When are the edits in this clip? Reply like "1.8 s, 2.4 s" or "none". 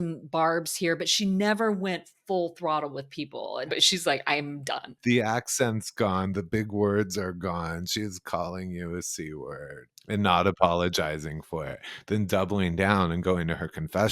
3.7 s, 5.0 s, 9.9 s